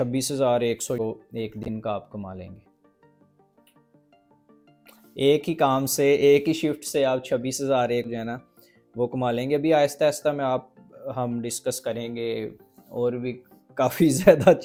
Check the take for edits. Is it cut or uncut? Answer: uncut